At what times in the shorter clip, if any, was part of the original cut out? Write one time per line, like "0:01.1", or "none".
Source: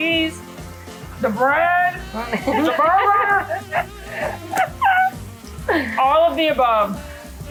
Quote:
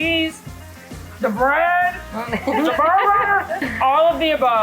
0:03.7